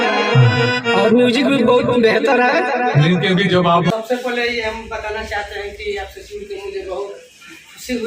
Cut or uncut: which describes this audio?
cut